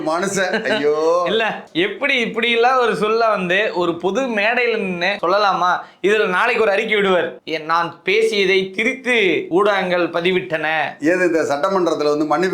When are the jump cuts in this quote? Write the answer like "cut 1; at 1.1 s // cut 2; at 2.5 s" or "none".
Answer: none